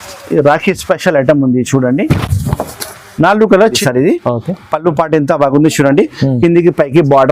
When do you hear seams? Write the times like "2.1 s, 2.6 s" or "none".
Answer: 3.8 s